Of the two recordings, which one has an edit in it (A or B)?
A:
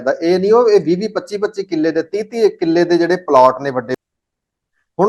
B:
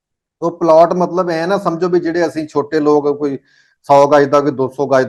A